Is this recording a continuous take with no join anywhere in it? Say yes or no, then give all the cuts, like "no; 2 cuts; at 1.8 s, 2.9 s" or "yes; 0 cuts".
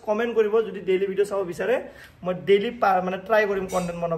yes; 0 cuts